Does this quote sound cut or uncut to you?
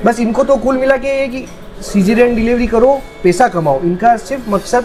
uncut